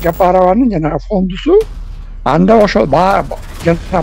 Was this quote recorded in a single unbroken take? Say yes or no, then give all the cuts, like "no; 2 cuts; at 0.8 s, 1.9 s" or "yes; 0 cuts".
yes; 0 cuts